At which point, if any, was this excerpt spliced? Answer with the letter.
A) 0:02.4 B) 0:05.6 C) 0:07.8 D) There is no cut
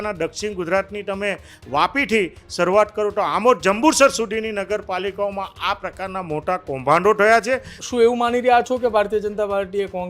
C